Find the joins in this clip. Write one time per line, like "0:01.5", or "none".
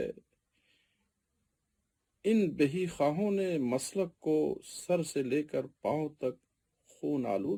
none